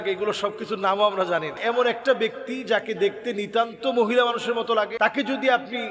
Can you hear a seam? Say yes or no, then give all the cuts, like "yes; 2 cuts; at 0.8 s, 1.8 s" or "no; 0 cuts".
yes; 2 cuts; at 1.6 s, 4.9 s